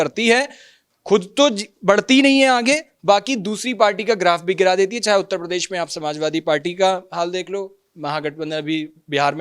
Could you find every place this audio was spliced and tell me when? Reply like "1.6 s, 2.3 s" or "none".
none

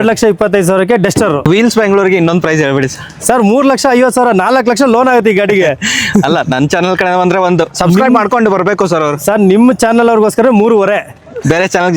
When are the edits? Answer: 1.4 s

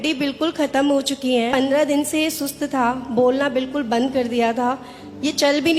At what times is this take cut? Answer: 1.5 s

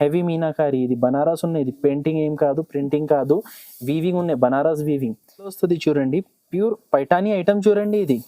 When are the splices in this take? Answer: 5.4 s

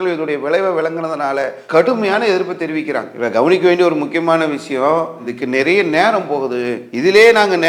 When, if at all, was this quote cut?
none

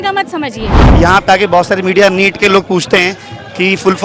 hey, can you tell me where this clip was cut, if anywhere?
0.9 s

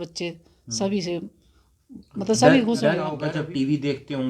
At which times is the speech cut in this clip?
3.1 s

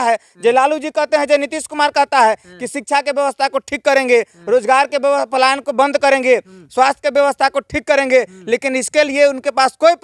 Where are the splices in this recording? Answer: none

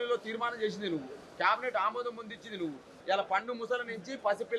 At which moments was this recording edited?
2.9 s

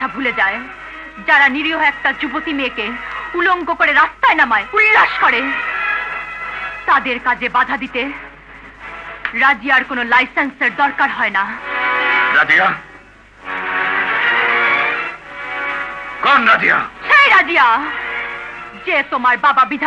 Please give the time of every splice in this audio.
none

